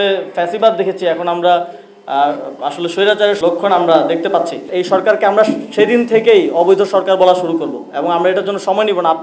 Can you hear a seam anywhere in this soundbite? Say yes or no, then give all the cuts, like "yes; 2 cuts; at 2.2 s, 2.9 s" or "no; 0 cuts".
yes; 2 cuts; at 3.4 s, 4.7 s